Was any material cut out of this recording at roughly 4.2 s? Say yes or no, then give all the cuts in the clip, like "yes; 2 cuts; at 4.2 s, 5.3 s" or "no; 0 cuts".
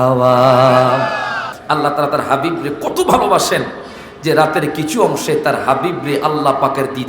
no; 1 cut; at 1.5 s